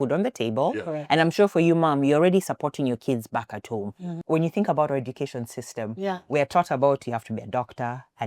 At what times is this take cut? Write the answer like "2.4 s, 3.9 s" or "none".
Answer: 4.1 s